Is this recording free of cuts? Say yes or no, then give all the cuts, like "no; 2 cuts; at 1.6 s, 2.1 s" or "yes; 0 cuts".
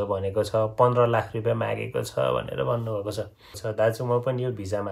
no; 1 cut; at 3.6 s